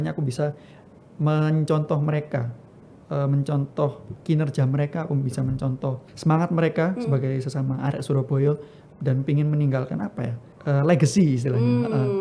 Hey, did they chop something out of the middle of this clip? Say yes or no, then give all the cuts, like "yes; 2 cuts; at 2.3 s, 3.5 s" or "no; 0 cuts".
yes; 3 cuts; at 4.1 s, 6.1 s, 10.4 s